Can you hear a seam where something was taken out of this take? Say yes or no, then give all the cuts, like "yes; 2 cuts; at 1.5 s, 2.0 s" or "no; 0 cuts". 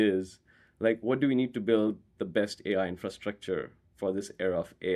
no; 0 cuts